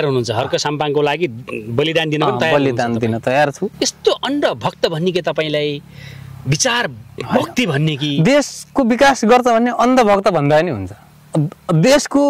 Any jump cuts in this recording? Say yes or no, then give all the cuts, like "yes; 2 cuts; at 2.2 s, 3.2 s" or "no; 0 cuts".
no; 0 cuts